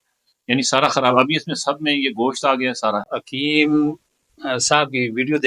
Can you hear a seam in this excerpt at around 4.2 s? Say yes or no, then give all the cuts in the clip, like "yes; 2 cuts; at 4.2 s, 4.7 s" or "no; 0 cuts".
no; 1 cut; at 3.0 s